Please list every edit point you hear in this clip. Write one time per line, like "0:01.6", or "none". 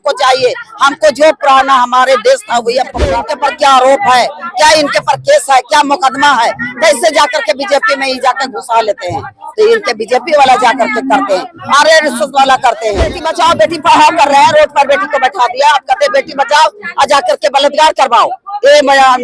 0:03.2
0:13.2